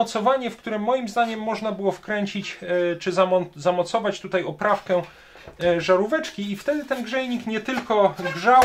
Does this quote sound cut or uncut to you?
uncut